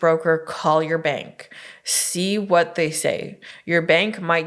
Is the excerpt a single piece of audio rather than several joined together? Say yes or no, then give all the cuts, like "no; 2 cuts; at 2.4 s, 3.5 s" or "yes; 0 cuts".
yes; 0 cuts